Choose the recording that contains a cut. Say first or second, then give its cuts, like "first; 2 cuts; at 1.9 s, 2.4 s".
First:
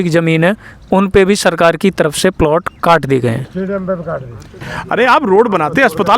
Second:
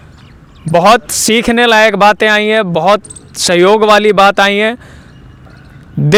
first; 1 cut; at 4.7 s